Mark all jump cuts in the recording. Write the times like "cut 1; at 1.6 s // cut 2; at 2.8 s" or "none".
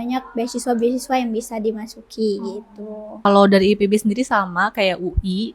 cut 1; at 3.2 s

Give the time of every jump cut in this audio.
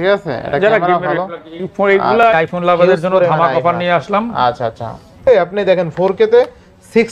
cut 1; at 2.3 s // cut 2; at 5.2 s

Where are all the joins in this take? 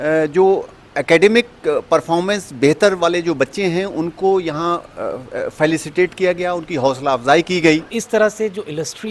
cut 1; at 8.0 s

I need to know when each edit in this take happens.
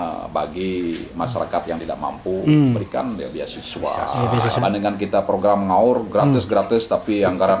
cut 1; at 4.6 s

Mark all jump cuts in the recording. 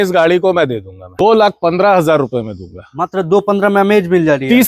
cut 1; at 1.1 s

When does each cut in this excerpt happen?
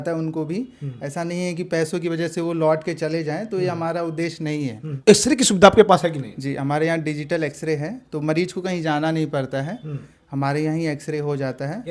cut 1; at 4.8 s

